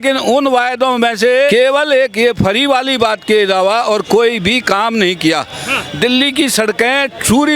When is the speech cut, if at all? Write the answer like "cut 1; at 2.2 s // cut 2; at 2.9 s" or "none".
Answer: cut 1; at 1.5 s